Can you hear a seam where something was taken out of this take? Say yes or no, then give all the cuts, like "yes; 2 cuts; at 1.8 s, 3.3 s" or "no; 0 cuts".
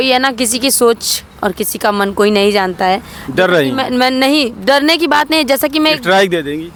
no; 0 cuts